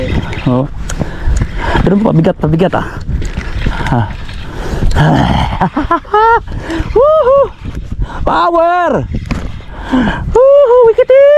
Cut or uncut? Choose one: uncut